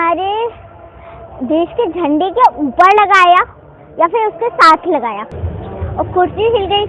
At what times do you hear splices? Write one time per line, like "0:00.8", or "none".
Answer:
0:05.3